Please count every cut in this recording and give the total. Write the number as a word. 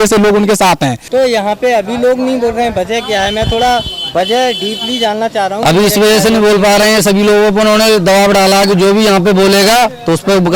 one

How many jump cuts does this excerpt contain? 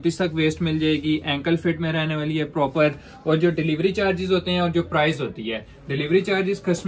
zero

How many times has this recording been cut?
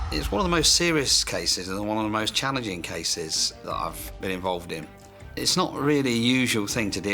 zero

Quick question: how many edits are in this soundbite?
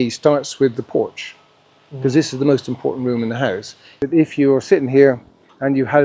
one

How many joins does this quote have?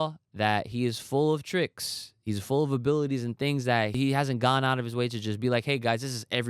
one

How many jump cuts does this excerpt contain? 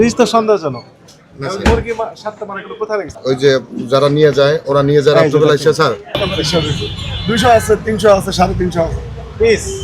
two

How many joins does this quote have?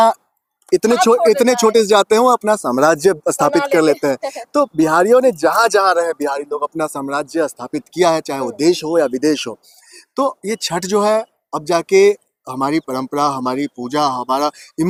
zero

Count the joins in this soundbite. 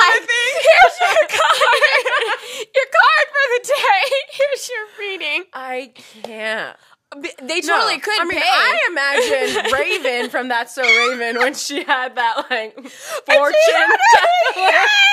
zero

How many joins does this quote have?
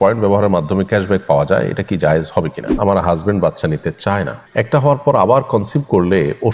two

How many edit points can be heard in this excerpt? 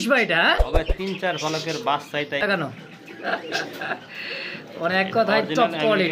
one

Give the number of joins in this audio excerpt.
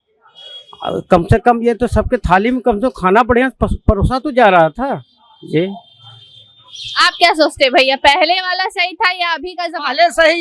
zero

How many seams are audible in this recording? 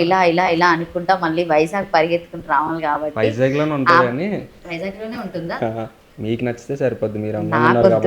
one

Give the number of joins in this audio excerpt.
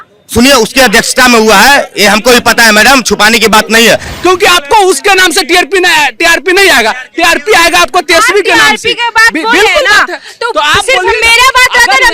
one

